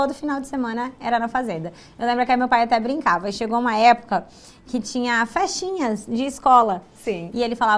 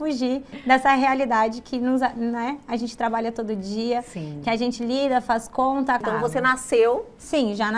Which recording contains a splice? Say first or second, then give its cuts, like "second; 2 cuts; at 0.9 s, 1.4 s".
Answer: second; 1 cut; at 6.0 s